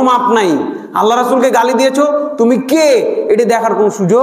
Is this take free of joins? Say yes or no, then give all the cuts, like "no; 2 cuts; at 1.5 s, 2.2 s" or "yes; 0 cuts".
yes; 0 cuts